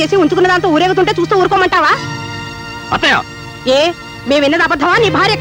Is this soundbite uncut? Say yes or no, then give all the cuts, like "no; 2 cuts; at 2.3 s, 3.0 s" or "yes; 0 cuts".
yes; 0 cuts